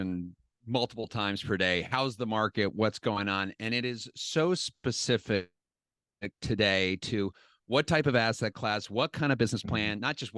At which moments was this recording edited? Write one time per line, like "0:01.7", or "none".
none